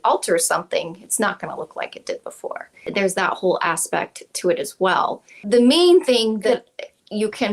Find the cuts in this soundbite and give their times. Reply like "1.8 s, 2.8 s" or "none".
2.8 s, 5.4 s, 6.5 s